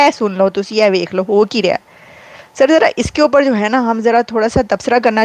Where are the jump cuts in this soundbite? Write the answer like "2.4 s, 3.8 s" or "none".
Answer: none